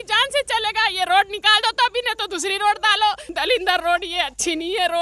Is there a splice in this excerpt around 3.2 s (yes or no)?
yes